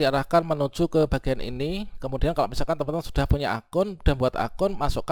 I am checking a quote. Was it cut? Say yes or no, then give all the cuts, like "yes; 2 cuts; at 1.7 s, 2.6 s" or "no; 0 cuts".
no; 0 cuts